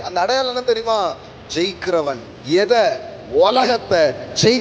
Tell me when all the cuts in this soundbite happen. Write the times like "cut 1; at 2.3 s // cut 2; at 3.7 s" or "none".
cut 1; at 2.3 s